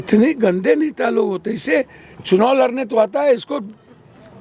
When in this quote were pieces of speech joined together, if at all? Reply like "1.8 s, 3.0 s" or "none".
none